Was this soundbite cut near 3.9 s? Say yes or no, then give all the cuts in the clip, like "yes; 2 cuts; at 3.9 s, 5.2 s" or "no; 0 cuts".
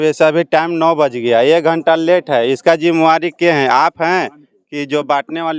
no; 0 cuts